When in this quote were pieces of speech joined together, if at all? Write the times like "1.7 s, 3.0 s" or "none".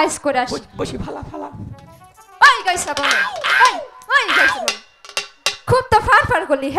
none